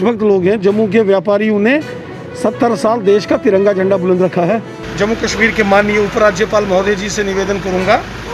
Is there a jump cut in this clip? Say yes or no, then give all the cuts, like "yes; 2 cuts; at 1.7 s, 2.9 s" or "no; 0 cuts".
yes; 1 cut; at 4.8 s